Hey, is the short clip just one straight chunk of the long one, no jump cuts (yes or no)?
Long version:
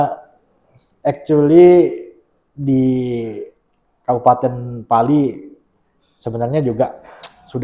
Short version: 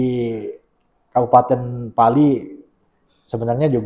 yes